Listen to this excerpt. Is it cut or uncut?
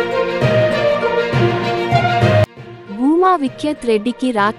cut